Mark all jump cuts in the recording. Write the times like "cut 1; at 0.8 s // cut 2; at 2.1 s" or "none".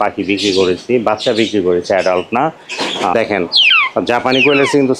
cut 1; at 3.1 s